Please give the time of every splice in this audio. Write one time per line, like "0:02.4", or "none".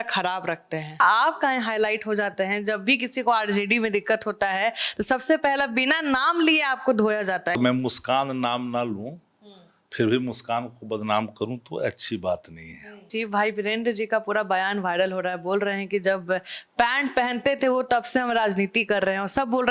0:01.0
0:07.6
0:13.1